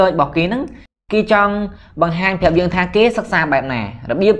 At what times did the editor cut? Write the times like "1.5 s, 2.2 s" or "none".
0.9 s